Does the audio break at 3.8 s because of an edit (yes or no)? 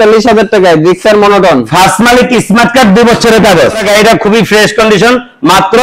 yes